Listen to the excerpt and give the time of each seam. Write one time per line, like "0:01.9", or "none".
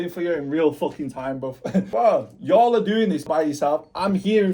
0:01.9
0:03.3